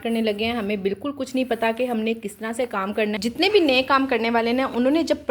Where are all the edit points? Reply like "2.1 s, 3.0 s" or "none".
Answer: 3.2 s

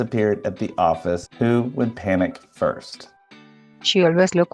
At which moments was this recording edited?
3.2 s

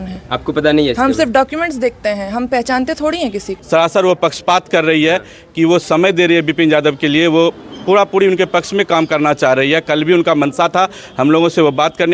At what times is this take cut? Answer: 3.6 s

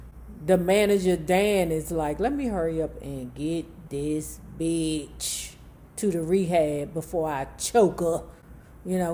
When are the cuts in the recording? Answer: none

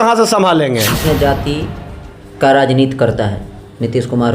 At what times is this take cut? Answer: 1.0 s

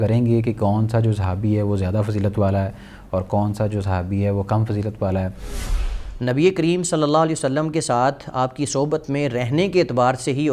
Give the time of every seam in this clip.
5.8 s

